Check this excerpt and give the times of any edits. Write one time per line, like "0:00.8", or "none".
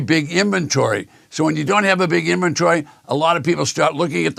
none